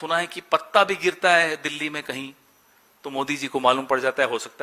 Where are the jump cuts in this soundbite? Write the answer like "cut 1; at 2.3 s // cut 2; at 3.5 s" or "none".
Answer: none